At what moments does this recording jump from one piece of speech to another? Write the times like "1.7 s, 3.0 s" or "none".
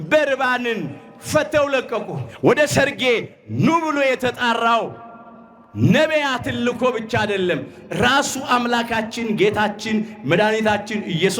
2.2 s